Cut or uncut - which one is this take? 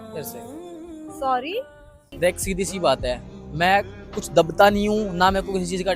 cut